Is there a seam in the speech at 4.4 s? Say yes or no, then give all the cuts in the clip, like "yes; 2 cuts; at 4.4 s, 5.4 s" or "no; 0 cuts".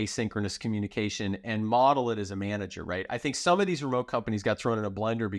no; 0 cuts